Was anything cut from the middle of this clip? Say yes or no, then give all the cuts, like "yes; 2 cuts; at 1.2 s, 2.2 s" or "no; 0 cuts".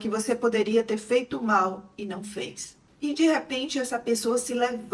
no; 0 cuts